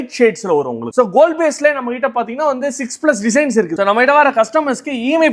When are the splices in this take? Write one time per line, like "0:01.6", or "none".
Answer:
0:00.9
0:03.8

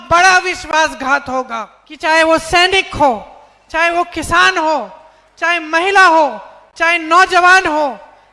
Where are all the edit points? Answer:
0:01.8

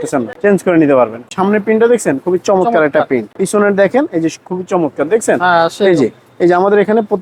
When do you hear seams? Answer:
0:01.2
0:03.3

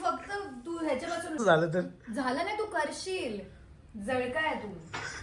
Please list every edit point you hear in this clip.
0:01.4

